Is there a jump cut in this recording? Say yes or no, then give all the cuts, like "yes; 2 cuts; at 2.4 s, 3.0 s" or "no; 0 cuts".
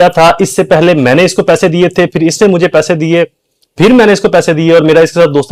no; 0 cuts